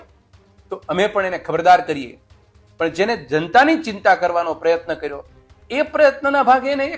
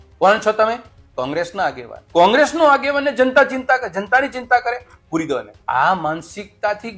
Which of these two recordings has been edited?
second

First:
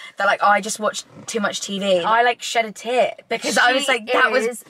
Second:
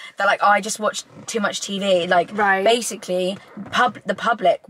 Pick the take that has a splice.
first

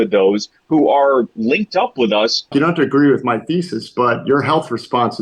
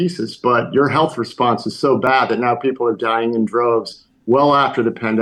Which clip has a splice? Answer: first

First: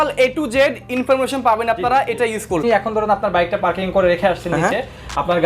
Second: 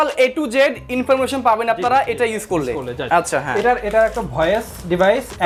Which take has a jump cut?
first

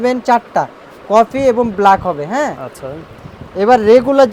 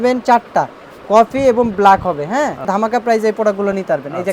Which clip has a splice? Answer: second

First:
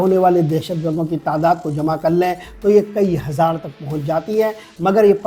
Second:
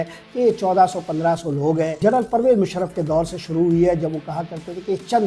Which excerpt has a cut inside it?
second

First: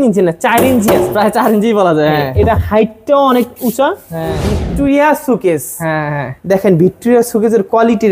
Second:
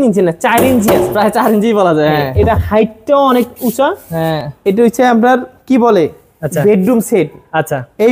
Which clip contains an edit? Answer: first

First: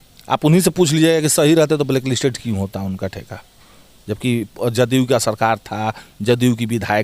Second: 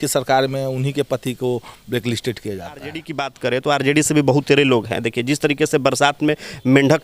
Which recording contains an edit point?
second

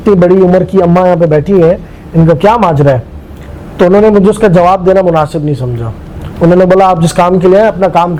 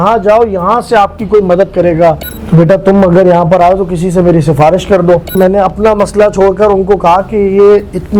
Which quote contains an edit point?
second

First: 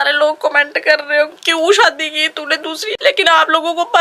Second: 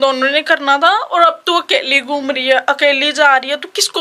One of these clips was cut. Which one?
first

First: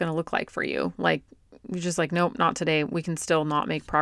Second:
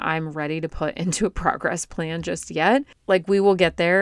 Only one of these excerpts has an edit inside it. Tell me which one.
second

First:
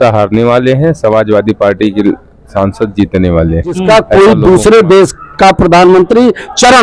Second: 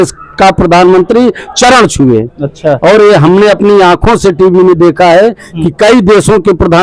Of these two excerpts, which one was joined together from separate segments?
first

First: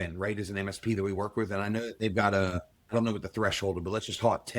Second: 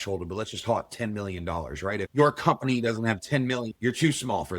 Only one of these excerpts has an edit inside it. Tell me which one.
second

